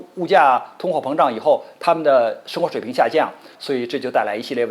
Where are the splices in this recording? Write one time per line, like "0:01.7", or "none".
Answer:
0:03.5